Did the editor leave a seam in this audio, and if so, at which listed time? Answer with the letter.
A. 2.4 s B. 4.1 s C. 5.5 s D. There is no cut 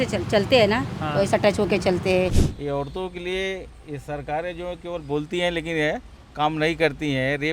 A